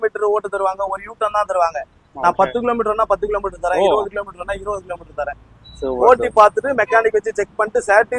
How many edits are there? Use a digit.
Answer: 0